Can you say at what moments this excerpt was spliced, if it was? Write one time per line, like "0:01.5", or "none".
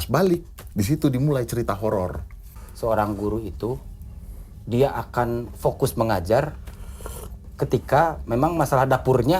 0:02.1